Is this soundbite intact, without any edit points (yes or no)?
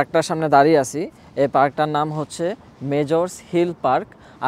yes